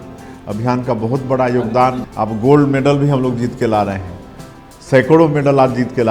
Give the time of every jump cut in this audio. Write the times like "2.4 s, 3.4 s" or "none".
2.0 s

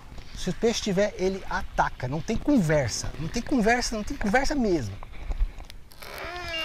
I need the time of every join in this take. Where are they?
none

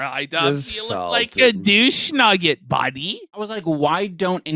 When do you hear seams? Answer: 3.5 s

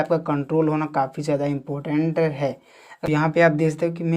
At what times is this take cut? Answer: 3.1 s

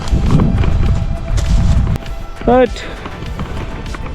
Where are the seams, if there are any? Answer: 1.9 s

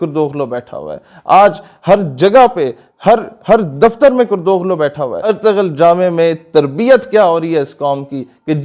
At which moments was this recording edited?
5.2 s

